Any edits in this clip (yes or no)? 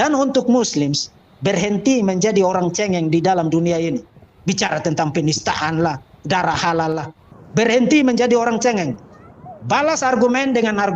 yes